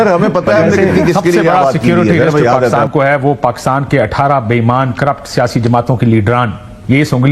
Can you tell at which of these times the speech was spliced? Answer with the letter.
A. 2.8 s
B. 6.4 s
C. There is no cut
A